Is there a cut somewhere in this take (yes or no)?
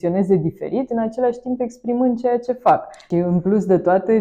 yes